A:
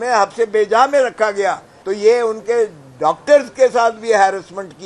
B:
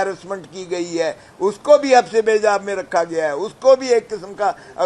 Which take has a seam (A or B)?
A